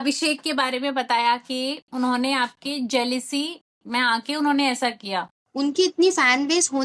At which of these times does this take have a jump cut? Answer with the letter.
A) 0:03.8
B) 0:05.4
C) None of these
B